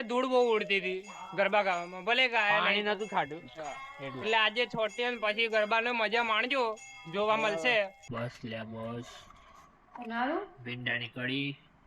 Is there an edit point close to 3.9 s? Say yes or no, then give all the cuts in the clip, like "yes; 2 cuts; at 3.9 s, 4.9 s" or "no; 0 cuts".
no; 1 cut; at 8.0 s